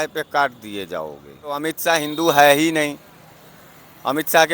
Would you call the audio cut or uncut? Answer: cut